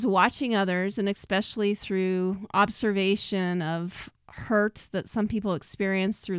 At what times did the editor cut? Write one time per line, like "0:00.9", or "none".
none